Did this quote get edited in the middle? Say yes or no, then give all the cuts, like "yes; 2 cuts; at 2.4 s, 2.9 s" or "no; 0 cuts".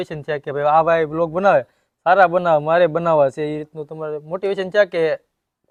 no; 0 cuts